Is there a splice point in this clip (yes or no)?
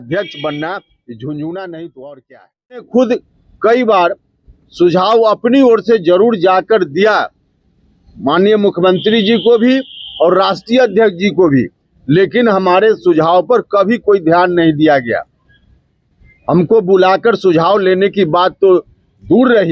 yes